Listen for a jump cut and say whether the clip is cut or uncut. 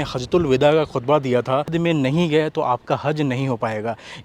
cut